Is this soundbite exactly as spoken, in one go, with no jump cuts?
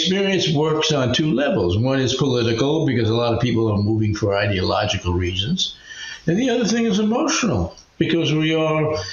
yes; 0 cuts

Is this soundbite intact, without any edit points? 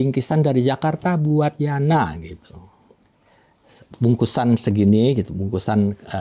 yes; 0 cuts

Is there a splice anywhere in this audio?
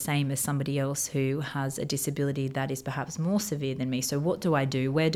no; 0 cuts

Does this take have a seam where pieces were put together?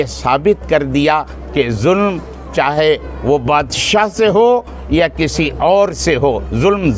no; 0 cuts

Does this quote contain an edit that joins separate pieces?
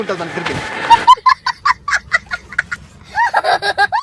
no; 0 cuts

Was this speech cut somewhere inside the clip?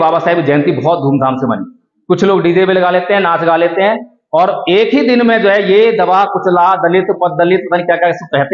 no; 0 cuts

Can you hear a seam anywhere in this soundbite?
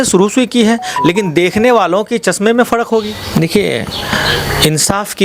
yes; 1 cut; at 3.2 s

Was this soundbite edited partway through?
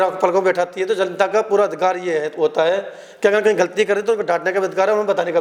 no; 0 cuts

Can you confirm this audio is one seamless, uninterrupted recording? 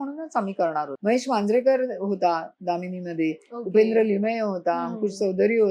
no; 1 cut; at 0.9 s

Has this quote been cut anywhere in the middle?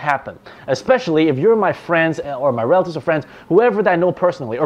no; 0 cuts

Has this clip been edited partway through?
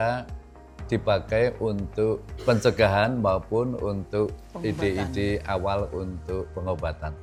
no; 0 cuts

